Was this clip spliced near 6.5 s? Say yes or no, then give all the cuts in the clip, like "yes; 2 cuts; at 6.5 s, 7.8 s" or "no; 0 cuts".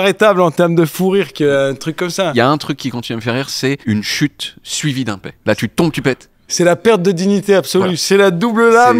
yes; 4 cuts; at 2.3 s, 3.8 s, 5.3 s, 6.5 s